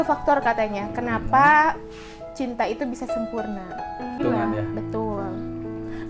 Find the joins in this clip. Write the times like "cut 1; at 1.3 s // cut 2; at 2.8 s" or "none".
cut 1; at 4.2 s

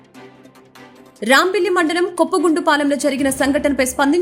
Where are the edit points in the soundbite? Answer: none

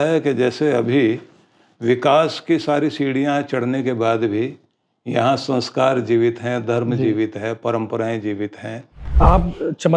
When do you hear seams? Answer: cut 1; at 9.0 s

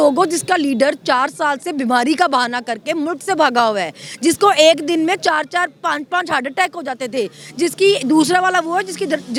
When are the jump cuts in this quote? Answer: none

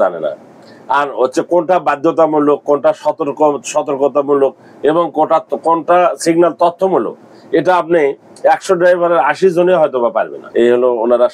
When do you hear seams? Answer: cut 1; at 10.4 s

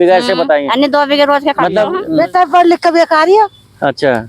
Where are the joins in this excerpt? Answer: cut 1; at 2.0 s

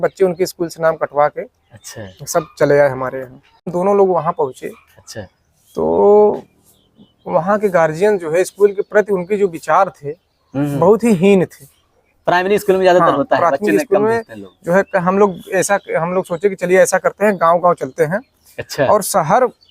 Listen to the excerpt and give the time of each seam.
cut 1; at 3.7 s

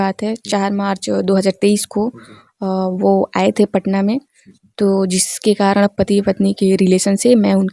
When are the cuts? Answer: none

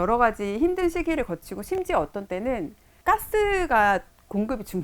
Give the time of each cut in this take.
cut 1; at 2.9 s

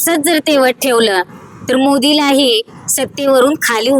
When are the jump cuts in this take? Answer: none

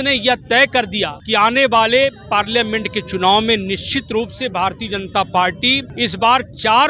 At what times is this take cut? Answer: cut 1; at 1.2 s // cut 2; at 5.9 s

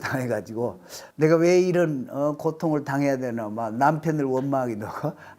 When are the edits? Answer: cut 1; at 1.0 s

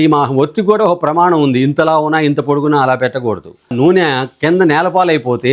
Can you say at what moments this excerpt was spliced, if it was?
cut 1; at 3.7 s

